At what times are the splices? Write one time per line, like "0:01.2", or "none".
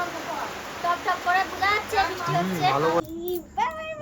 0:03.0